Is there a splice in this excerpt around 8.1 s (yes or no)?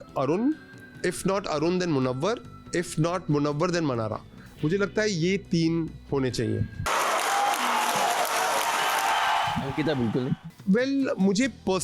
no